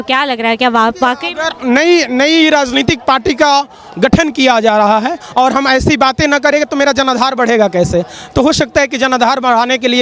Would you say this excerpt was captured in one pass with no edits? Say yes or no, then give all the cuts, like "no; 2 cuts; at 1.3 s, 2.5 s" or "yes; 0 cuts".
yes; 0 cuts